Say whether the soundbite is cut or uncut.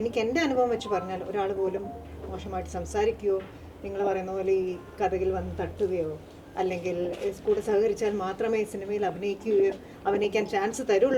uncut